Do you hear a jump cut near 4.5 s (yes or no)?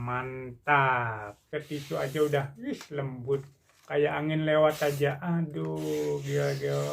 no